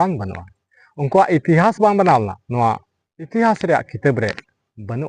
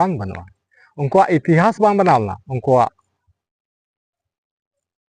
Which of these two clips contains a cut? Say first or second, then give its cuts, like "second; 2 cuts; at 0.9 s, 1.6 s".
first; 1 cut; at 2.4 s